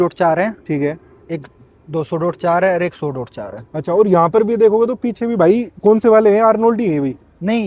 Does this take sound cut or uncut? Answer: uncut